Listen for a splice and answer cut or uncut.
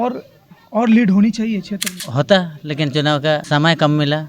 cut